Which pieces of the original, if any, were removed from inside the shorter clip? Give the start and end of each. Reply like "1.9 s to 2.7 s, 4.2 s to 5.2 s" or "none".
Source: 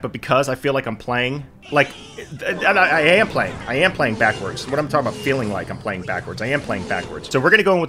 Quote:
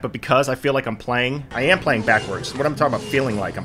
1.5 s to 3.6 s